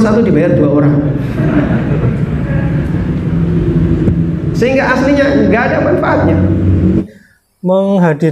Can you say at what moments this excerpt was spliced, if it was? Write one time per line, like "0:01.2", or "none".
0:07.0